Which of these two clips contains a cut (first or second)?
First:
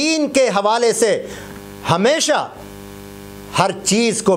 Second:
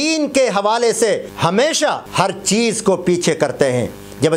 second